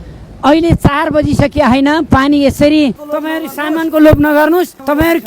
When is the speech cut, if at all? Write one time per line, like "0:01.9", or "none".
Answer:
0:03.0